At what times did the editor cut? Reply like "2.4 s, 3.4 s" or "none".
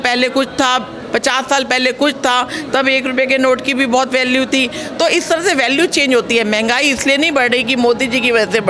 none